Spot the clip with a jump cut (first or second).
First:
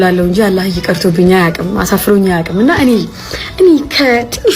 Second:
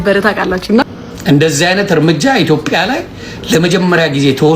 second